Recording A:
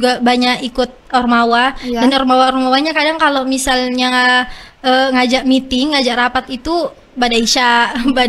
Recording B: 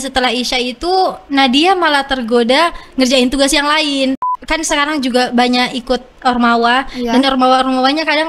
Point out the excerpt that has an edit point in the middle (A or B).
B